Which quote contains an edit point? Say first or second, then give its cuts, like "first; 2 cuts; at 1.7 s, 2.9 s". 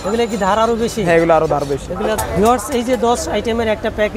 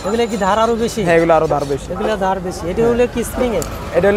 first; 1 cut; at 2.2 s